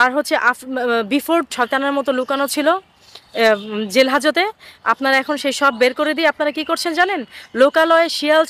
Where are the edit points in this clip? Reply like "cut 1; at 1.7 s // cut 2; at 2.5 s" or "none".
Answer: cut 1; at 1.5 s